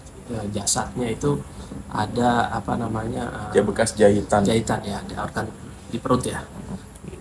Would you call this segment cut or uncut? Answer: uncut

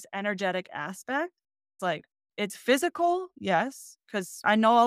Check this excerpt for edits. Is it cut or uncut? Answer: cut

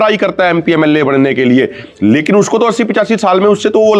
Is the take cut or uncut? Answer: uncut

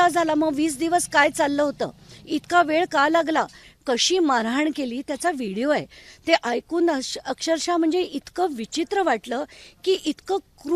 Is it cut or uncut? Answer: cut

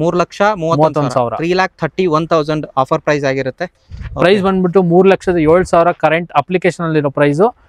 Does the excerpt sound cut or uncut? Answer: cut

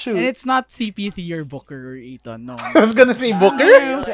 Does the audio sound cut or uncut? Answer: uncut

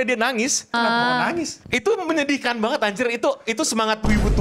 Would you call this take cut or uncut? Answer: cut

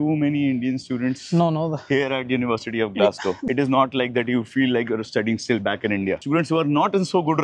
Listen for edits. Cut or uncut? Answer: cut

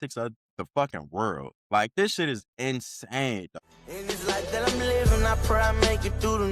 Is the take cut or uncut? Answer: cut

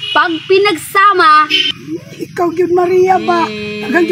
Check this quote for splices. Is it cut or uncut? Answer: cut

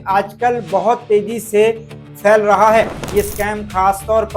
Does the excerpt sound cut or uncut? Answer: cut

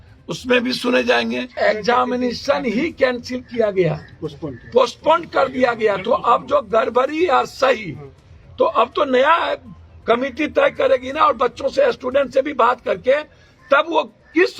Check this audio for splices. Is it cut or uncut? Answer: cut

